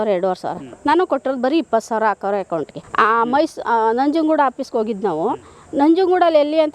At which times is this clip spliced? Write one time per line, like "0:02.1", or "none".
0:02.8